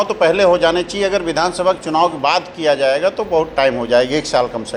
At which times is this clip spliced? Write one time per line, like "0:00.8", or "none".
none